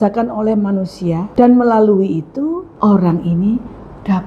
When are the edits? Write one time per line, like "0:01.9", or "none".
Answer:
0:01.2
0:02.7